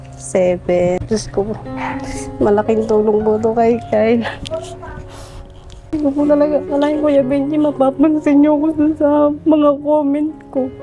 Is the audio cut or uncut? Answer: cut